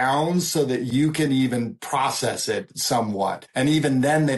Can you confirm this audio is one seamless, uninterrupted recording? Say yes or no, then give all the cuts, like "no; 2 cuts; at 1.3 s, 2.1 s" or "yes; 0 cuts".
no; 1 cut; at 3.4 s